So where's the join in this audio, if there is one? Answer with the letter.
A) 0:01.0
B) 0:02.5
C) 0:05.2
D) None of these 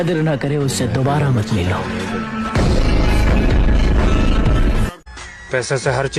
C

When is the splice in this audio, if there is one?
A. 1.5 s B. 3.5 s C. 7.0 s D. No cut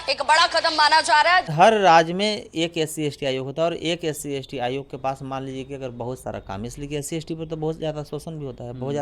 A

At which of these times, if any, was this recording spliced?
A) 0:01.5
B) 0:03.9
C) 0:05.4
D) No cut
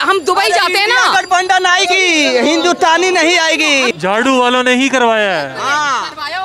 B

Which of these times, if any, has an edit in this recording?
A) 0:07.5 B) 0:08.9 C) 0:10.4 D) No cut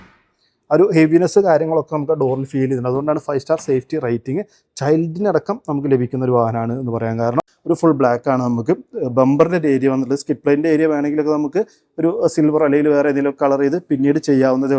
A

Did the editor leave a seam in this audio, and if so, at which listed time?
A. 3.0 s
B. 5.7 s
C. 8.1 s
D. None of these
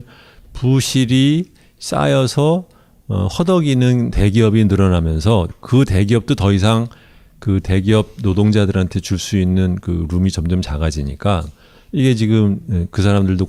D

